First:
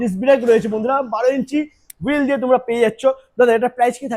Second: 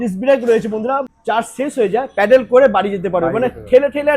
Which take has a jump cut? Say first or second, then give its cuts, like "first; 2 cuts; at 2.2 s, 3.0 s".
second; 1 cut; at 1.1 s